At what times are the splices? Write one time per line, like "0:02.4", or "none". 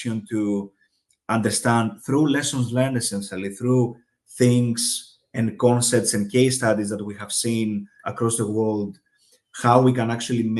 none